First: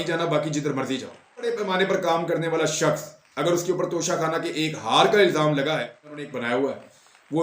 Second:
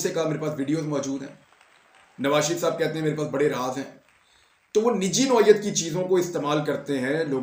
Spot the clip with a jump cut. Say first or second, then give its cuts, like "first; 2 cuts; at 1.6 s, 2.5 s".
first; 2 cuts; at 1.4 s, 6.3 s